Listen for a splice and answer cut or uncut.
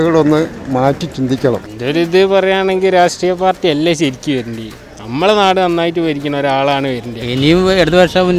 cut